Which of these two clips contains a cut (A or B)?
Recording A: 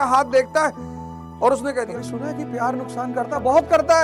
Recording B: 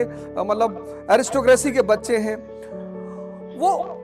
A